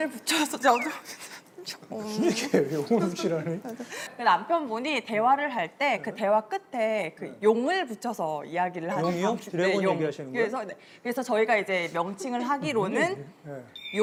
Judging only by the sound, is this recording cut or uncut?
uncut